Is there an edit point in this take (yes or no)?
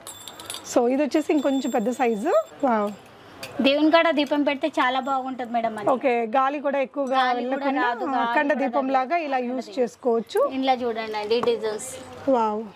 no